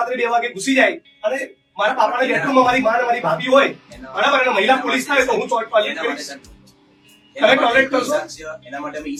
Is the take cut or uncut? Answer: uncut